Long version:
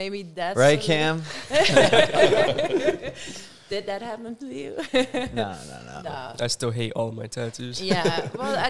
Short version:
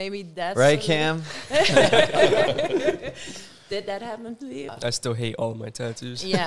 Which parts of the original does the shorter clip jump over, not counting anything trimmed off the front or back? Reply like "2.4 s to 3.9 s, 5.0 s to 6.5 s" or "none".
4.7 s to 6.3 s